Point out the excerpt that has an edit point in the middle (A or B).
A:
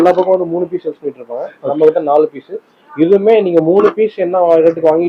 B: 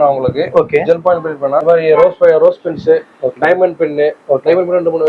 B